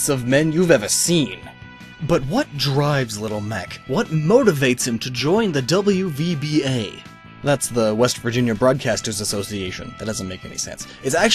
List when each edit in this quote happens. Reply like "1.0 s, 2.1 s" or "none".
10.2 s